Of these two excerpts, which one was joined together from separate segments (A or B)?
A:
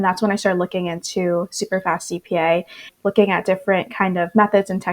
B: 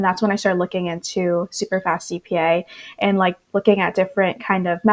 A